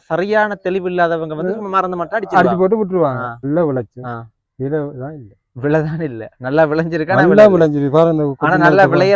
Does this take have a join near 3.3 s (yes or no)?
yes